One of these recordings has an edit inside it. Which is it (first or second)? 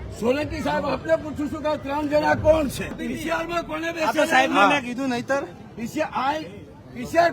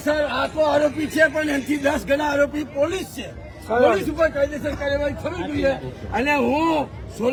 first